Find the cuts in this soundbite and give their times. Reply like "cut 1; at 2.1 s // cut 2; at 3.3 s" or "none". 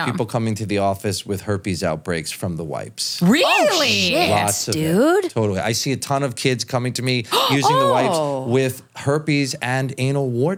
none